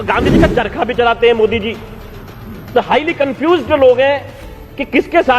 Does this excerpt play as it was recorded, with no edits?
yes; 0 cuts

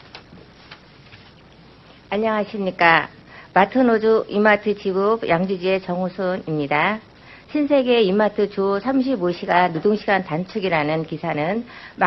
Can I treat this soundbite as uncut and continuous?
yes; 0 cuts

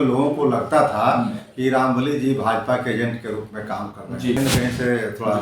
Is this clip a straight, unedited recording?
no; 1 cut; at 4.4 s

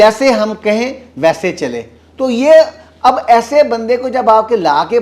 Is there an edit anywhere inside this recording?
no; 0 cuts

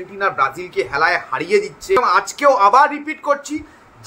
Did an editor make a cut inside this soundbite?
yes; 1 cut; at 2.0 s

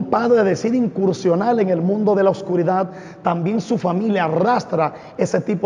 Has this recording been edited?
no; 0 cuts

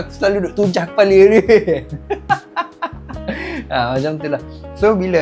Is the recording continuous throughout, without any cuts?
yes; 0 cuts

